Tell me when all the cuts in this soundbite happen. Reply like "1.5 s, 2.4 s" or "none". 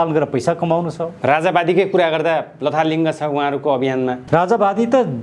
4.2 s